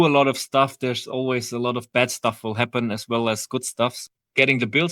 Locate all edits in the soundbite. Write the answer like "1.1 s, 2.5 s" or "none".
4.0 s